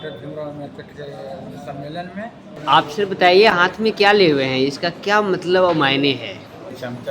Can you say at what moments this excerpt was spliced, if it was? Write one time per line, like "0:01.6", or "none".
0:02.6